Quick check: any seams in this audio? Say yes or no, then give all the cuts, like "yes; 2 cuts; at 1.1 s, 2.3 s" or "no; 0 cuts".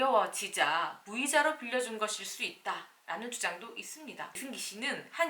yes; 1 cut; at 4.4 s